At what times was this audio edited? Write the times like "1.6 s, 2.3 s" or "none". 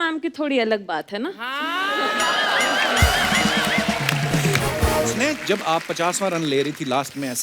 5.1 s

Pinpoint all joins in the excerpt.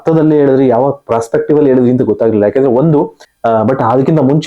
3.2 s

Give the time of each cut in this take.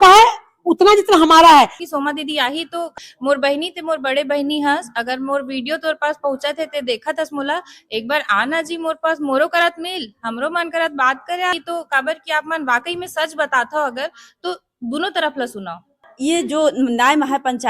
1.8 s, 3.0 s, 11.5 s, 16.1 s

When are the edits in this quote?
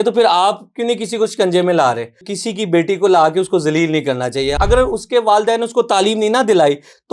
2.3 s, 4.5 s

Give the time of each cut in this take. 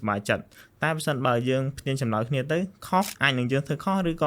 3.1 s

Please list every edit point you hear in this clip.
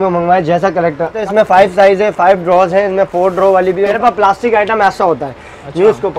1.2 s, 4.0 s

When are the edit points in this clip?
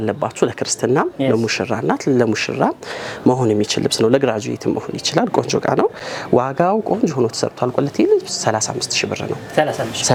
none

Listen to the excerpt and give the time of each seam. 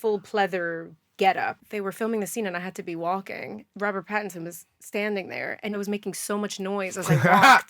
1.6 s, 3.6 s, 5.8 s

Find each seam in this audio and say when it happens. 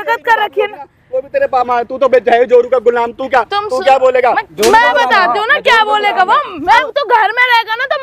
1.7 s, 6.9 s

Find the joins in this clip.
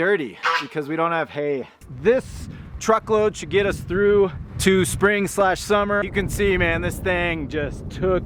1.8 s, 4.5 s, 6.1 s

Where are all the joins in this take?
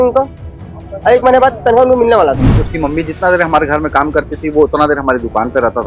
2.6 s

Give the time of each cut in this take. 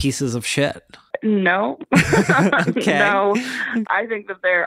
1.1 s, 3.8 s

